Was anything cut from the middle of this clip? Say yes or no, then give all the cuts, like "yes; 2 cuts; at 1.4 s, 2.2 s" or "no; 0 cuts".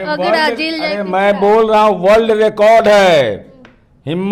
no; 0 cuts